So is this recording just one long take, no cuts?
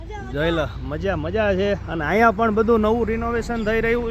no; 1 cut; at 1.3 s

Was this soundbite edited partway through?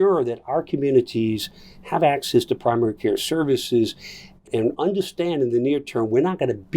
yes; 1 cut; at 4.4 s

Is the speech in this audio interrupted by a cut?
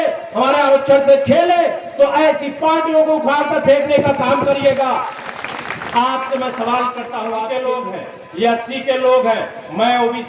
yes; 1 cut; at 7.4 s

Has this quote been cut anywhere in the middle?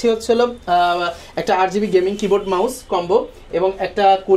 no; 0 cuts

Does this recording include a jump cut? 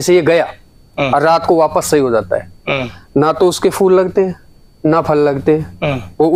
no; 0 cuts

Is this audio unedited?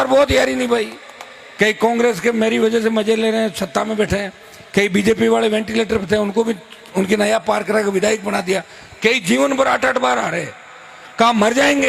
yes; 0 cuts

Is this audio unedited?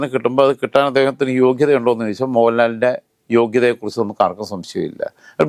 yes; 0 cuts

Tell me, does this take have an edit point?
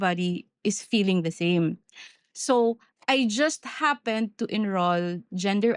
no; 0 cuts

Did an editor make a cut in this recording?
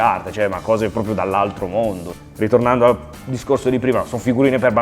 no; 0 cuts

